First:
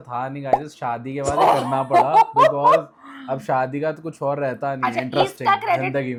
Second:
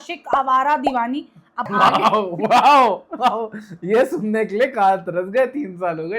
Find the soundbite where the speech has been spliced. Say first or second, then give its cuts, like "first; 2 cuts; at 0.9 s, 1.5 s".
second; 1 cut; at 1.6 s